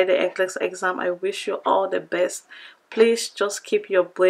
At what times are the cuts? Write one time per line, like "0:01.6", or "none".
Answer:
none